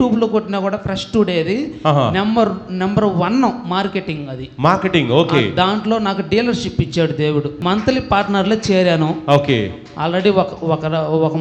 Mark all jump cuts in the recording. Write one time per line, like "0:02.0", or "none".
0:07.6